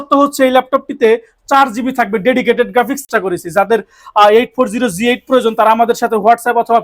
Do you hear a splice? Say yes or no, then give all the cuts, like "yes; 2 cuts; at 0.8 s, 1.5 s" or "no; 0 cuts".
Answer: yes; 1 cut; at 3.0 s